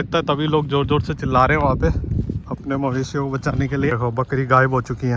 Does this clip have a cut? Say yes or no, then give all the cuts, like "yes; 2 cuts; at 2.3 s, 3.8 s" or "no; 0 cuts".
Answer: yes; 1 cut; at 3.9 s